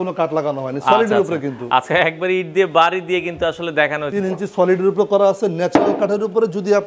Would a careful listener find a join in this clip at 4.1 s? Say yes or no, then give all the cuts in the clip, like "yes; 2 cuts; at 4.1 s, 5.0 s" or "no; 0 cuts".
yes; 1 cut; at 4.1 s